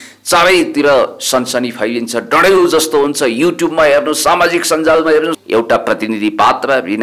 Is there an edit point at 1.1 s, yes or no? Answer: no